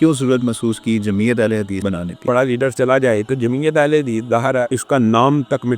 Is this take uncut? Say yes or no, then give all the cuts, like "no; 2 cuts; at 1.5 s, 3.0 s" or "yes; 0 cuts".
no; 2 cuts; at 2.2 s, 4.8 s